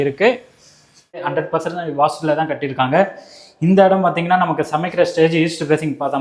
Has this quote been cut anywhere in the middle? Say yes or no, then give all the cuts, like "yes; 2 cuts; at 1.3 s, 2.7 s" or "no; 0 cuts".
yes; 1 cut; at 1.2 s